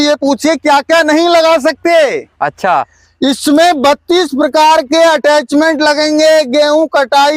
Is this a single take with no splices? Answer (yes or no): yes